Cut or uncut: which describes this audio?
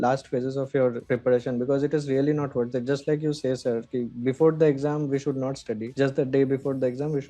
uncut